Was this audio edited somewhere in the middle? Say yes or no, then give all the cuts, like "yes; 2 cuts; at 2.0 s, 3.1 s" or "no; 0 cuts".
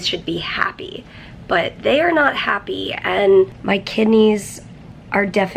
yes; 1 cut; at 3.6 s